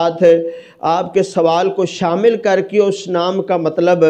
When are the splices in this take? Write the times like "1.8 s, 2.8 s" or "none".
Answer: none